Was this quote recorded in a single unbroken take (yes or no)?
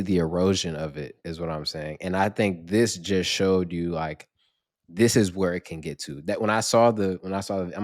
yes